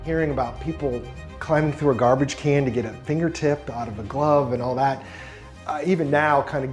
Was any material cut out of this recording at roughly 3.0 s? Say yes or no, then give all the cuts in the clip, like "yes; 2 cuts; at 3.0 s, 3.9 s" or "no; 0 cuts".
no; 0 cuts